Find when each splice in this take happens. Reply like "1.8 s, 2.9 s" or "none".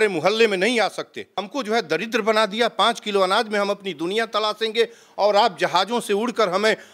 1.5 s